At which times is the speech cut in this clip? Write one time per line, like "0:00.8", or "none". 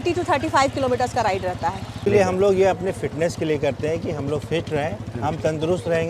0:02.0